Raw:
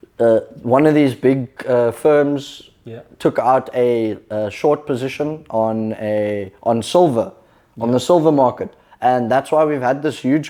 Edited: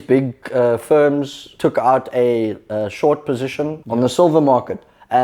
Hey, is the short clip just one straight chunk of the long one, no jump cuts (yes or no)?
no